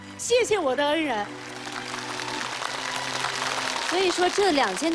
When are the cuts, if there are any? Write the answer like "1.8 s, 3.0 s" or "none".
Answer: 3.8 s